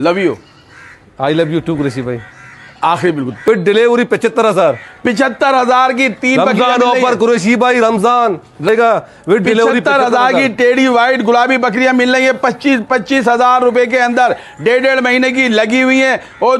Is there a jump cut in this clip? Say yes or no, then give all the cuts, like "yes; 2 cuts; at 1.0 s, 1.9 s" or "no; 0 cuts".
yes; 2 cuts; at 3.5 s, 8.7 s